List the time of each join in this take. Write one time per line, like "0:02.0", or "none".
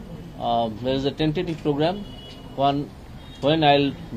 none